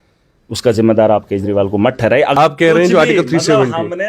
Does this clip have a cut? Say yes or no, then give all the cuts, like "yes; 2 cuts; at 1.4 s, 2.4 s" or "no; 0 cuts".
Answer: yes; 1 cut; at 2.4 s